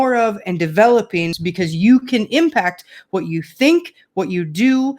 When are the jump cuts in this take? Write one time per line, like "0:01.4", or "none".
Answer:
0:01.4

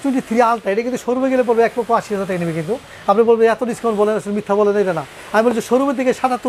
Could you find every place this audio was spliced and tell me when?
none

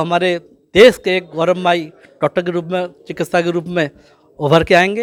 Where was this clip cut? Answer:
none

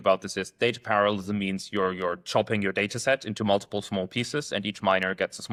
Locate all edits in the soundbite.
none

